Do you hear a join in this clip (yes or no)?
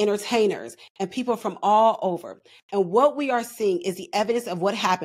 no